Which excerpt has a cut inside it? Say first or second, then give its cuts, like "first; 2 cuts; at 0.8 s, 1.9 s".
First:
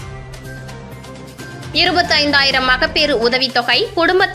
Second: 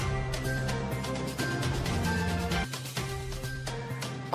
first; 1 cut; at 1.0 s